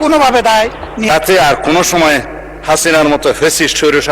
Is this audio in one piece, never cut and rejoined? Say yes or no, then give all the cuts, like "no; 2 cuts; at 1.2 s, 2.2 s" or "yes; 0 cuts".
no; 1 cut; at 1.1 s